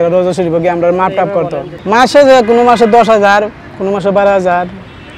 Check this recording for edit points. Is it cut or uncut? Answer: cut